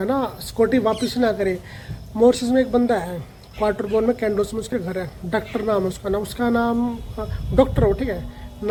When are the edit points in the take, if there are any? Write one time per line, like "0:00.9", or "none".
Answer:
none

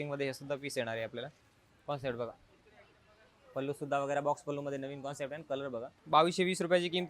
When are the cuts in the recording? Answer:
0:05.9

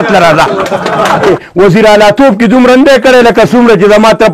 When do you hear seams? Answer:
0:01.3

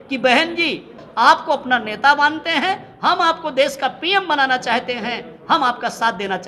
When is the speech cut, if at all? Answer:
0:01.0

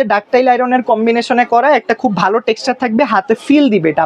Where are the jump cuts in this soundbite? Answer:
none

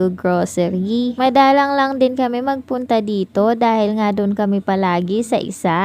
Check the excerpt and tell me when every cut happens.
none

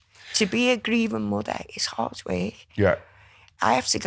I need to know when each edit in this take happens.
none

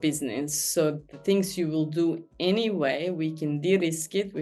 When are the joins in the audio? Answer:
none

